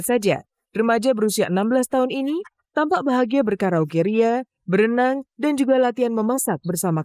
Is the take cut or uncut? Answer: uncut